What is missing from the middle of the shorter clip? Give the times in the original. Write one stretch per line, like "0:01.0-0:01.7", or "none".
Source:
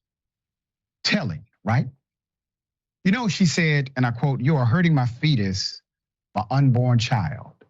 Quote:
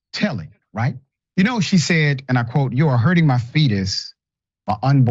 0:02.0-0:02.8